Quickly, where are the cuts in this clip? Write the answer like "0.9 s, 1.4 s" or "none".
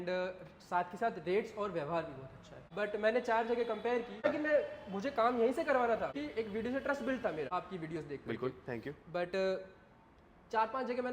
2.7 s, 4.2 s, 6.2 s, 7.5 s